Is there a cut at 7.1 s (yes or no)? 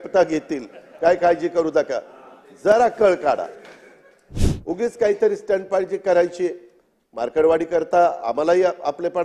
no